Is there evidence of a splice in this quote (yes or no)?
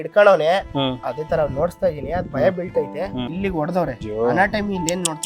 yes